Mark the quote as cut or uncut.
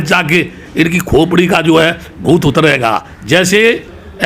uncut